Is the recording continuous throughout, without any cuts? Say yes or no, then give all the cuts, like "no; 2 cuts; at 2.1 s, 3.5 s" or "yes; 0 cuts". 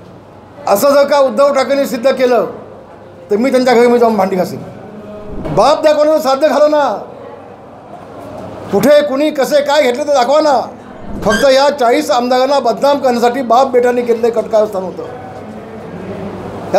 no; 2 cuts; at 5.4 s, 11.1 s